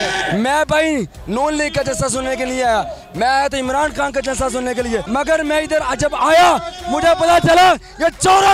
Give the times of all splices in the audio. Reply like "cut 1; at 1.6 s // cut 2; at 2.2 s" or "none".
cut 1; at 5.1 s

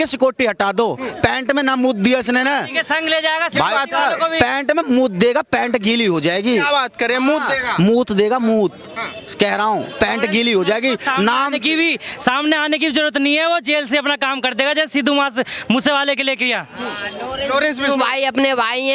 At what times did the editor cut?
none

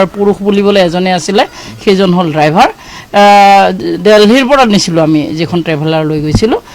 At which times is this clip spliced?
none

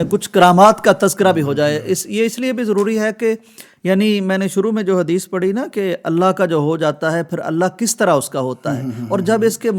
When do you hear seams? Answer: none

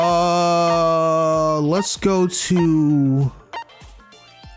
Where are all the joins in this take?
cut 1; at 3.7 s

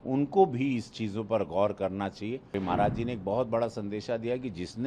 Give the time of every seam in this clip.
cut 1; at 2.6 s

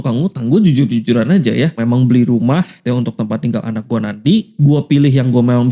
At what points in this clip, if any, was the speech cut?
cut 1; at 1.8 s // cut 2; at 2.7 s // cut 3; at 4.5 s

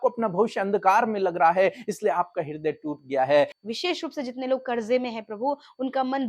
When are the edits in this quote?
cut 1; at 3.6 s

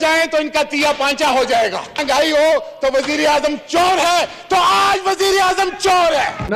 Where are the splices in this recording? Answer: none

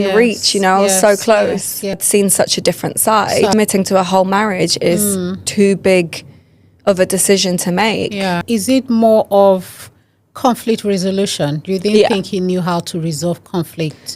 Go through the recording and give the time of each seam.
cut 1; at 2.0 s // cut 2; at 3.5 s // cut 3; at 8.4 s

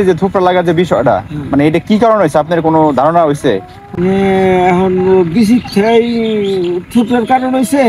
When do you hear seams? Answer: none

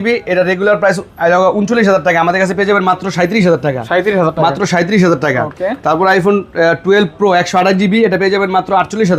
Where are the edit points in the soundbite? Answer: none

